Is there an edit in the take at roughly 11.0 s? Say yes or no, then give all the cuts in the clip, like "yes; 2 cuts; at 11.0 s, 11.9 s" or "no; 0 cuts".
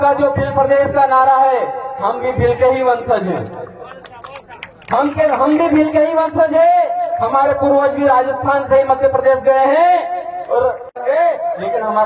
yes; 1 cut; at 11.0 s